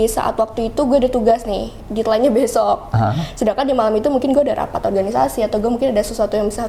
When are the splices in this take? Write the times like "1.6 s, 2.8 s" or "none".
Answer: none